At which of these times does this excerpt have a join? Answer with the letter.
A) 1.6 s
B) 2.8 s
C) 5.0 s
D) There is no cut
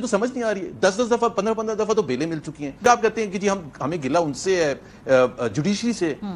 B